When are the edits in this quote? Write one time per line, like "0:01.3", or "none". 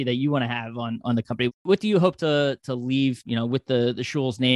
0:01.6
0:03.2